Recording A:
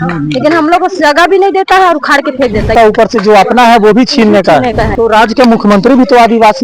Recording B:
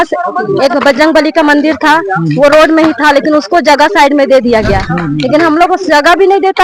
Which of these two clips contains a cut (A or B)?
A